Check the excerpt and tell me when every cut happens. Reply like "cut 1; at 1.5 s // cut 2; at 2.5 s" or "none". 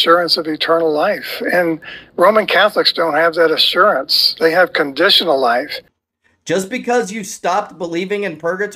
cut 1; at 5.8 s

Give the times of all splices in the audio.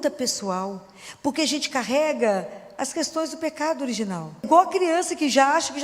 cut 1; at 4.5 s

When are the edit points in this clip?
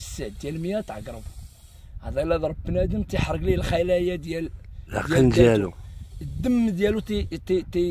none

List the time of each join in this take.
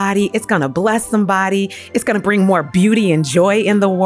none

